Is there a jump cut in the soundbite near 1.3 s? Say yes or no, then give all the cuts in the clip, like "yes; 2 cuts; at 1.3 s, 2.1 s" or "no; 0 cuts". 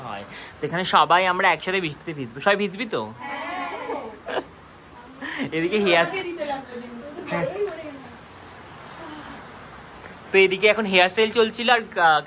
no; 0 cuts